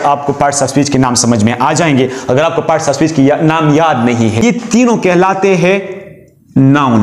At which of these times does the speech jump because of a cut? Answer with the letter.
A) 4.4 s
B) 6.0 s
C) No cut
A